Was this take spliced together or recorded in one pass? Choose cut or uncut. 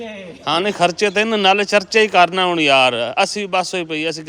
uncut